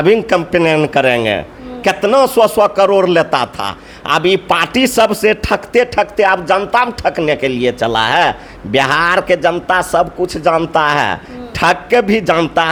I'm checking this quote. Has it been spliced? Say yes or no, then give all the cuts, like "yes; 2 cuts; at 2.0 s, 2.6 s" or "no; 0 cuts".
no; 0 cuts